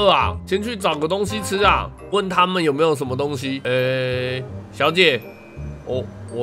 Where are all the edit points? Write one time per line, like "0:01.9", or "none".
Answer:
0:03.5